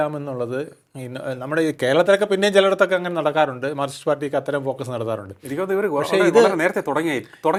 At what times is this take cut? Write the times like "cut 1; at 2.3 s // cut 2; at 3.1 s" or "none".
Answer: none